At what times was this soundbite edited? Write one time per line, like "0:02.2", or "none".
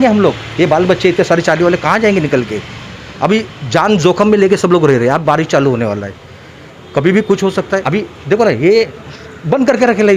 none